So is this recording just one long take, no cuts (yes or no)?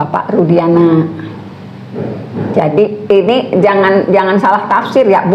yes